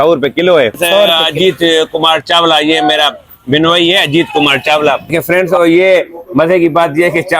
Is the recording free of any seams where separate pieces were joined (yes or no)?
no